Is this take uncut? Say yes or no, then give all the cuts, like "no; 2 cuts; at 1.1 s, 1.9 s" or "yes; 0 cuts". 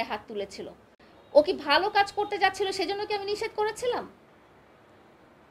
yes; 0 cuts